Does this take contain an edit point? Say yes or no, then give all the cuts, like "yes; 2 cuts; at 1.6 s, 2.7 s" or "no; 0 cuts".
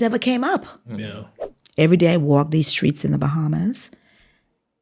yes; 1 cut; at 1.3 s